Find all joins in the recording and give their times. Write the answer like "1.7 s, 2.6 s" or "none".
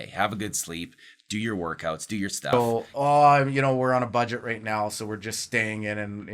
2.5 s